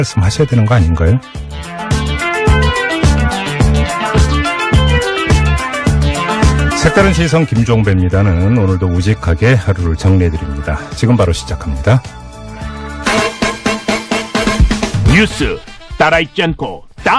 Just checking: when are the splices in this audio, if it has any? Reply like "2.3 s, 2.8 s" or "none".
none